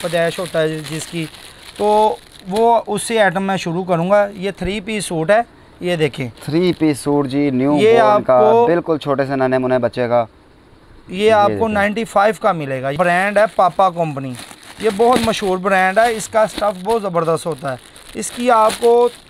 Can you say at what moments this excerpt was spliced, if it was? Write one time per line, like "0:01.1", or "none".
0:12.9

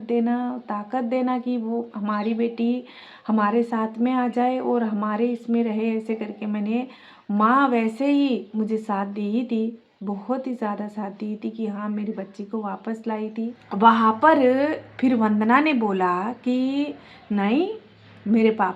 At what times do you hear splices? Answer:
0:13.6

